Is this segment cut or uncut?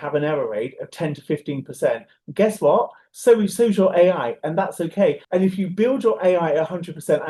uncut